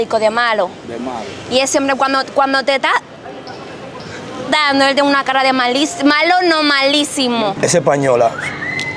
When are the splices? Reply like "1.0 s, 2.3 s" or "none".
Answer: 7.4 s